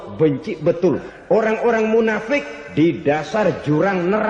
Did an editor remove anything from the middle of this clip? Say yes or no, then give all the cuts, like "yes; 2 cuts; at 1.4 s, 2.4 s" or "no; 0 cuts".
yes; 1 cut; at 1.4 s